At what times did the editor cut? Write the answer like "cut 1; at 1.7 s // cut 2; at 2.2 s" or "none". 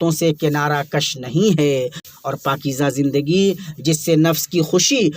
cut 1; at 2.0 s